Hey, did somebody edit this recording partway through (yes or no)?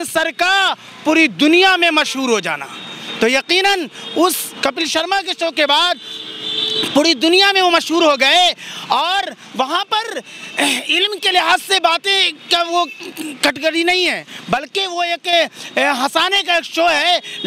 no